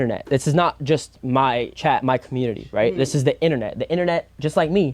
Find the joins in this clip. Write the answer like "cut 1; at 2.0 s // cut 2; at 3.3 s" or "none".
cut 1; at 1.7 s